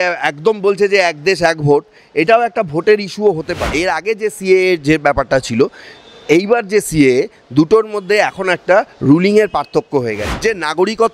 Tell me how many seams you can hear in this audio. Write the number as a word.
two